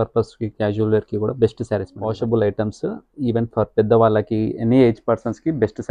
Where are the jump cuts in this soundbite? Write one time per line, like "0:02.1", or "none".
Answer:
0:02.0